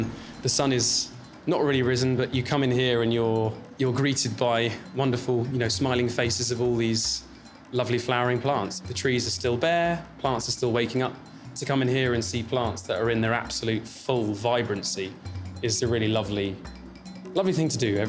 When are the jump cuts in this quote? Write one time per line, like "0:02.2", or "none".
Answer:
0:02.3
0:09.3